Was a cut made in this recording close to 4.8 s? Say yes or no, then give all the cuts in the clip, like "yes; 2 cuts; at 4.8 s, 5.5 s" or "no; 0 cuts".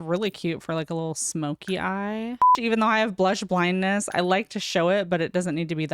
no; 1 cut; at 2.6 s